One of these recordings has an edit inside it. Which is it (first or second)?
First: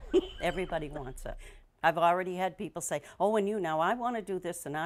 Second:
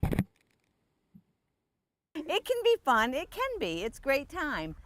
second